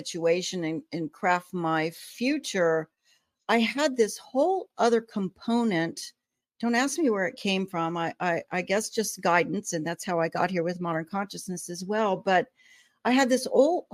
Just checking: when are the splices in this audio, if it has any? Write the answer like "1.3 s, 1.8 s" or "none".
none